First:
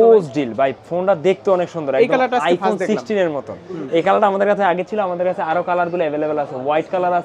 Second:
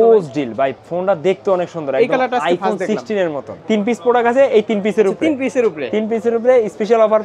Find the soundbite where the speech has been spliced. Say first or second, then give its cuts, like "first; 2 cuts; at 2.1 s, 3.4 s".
second; 1 cut; at 3.5 s